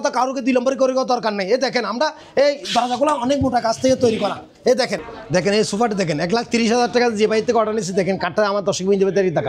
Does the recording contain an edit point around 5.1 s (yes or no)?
yes